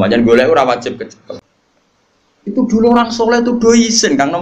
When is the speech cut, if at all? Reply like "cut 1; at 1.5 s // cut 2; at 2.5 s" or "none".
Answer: cut 1; at 1.4 s